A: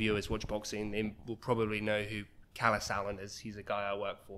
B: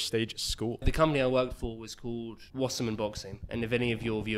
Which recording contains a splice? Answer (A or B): B